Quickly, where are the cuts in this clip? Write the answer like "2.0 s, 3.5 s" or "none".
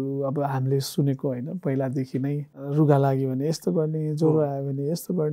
2.6 s